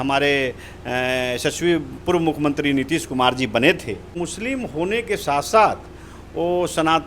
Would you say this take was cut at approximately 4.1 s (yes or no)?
yes